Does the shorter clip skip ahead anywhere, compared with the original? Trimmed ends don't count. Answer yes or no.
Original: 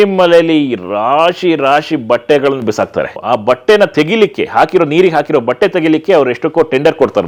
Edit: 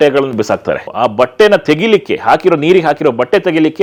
no